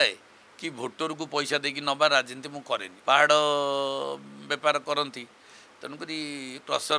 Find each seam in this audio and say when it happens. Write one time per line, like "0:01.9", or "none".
0:02.9